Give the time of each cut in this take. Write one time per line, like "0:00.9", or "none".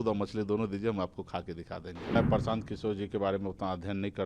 0:02.2